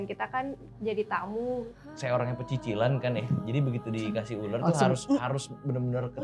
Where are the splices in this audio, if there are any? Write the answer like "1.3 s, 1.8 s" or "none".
1.8 s